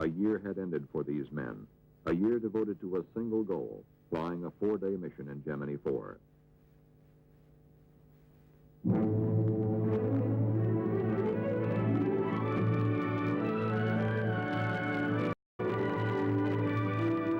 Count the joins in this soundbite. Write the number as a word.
one